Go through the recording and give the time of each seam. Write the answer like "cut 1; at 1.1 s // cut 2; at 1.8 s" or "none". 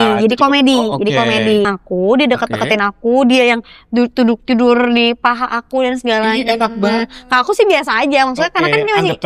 cut 1; at 1.7 s

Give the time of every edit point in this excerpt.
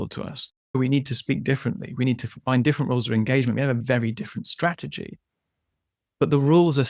cut 1; at 0.7 s // cut 2; at 2.4 s // cut 3; at 3.8 s

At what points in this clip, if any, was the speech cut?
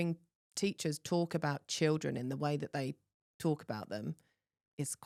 none

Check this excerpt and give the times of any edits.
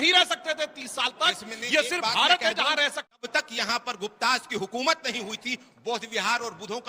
cut 1; at 3.2 s

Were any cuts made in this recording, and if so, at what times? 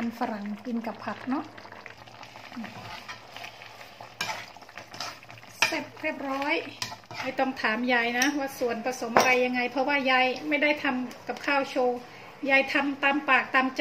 cut 1; at 2.0 s // cut 2; at 7.3 s

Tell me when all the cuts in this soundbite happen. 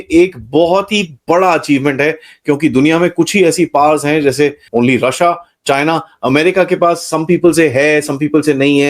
cut 1; at 4.6 s

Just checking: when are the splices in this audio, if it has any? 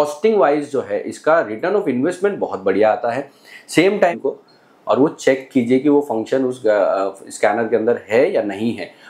cut 1; at 4.2 s

